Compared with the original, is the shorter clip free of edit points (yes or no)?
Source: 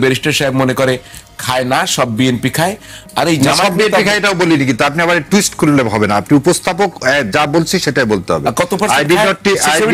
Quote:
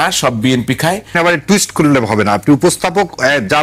no